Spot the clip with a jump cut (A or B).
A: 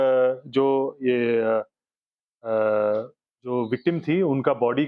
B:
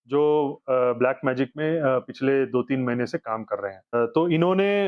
B